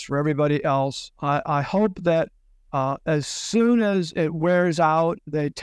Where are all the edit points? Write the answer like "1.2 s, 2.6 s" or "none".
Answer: 1.1 s

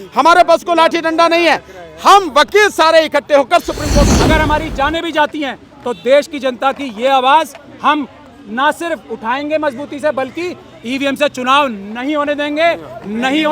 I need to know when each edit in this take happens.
4.1 s

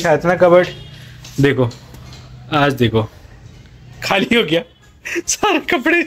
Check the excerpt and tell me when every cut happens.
none

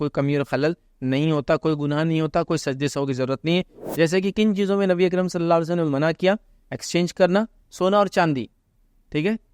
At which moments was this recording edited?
3.8 s, 7.6 s

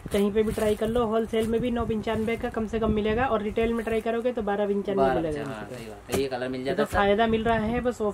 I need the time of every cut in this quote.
none

